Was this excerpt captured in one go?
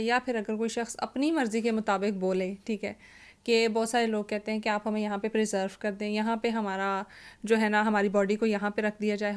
yes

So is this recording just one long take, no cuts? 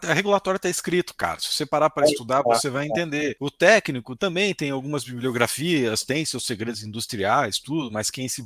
no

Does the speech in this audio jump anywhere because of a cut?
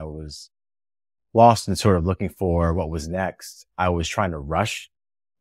no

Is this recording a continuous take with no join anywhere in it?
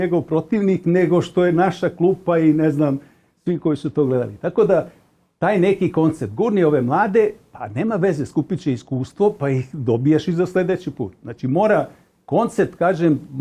yes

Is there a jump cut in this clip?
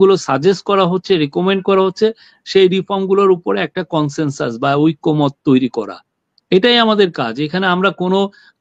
no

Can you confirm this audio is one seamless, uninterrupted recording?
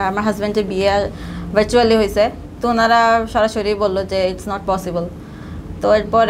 yes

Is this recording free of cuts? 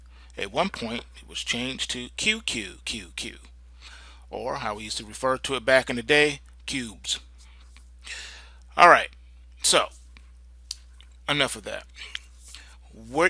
no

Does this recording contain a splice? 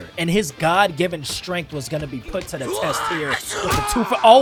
no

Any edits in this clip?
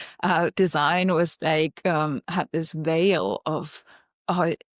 no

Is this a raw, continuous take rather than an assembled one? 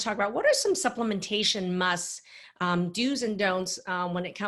yes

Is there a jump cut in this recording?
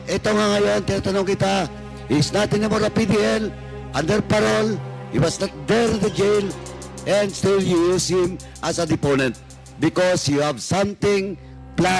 no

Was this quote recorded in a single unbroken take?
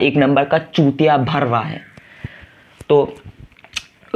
yes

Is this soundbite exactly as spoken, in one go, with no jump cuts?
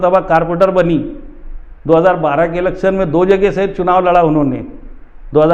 yes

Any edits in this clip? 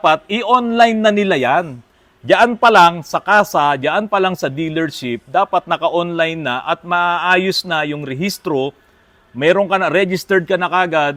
no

